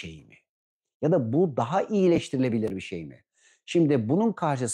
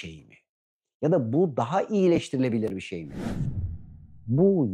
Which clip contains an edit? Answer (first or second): second